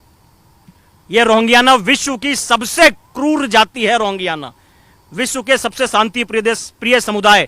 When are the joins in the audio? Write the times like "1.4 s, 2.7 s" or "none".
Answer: none